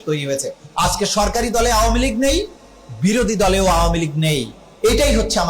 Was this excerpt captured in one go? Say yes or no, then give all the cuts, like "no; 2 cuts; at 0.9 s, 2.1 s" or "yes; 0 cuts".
yes; 0 cuts